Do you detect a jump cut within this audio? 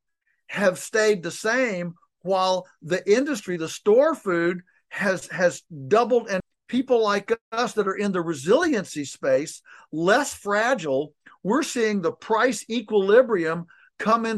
yes; 1 cut; at 6.4 s

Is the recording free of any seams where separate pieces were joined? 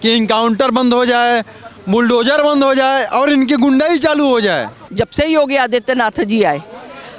no; 1 cut; at 4.8 s

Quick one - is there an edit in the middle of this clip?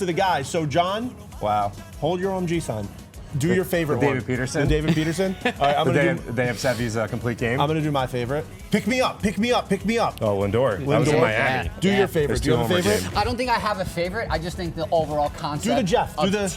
yes; 2 cuts; at 3.2 s, 8.5 s

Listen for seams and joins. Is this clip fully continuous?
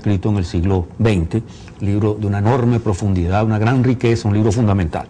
no; 1 cut; at 2.1 s

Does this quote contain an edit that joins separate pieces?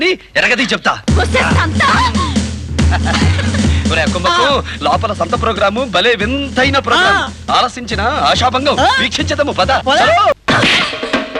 yes; 1 cut; at 10.3 s

